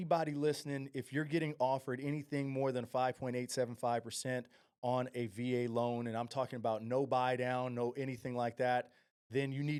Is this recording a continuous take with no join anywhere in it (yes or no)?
yes